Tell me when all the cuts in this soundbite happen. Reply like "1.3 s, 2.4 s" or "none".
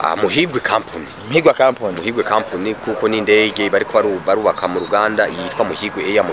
none